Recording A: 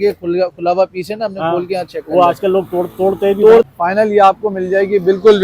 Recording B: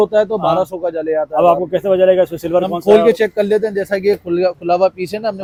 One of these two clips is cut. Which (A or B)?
A